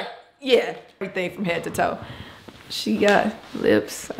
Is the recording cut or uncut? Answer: cut